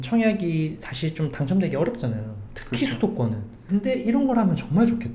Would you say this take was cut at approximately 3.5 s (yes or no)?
yes